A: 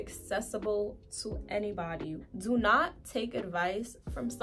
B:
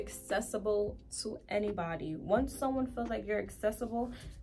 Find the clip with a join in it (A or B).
A